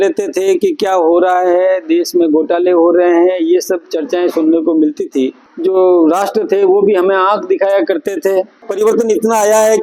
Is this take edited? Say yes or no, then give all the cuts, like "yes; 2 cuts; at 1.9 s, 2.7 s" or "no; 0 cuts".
yes; 2 cuts; at 5.4 s, 8.6 s